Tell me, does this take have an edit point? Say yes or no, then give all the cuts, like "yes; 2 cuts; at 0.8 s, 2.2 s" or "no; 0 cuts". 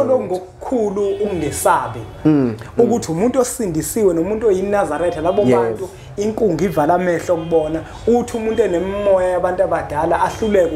no; 0 cuts